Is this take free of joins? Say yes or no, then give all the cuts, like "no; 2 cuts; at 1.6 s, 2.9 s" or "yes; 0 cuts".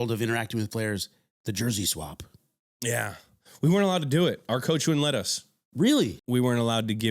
no; 1 cut; at 6.2 s